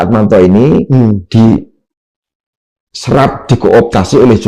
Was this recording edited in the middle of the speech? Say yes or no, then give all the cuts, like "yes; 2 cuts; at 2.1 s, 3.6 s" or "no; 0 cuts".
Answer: no; 0 cuts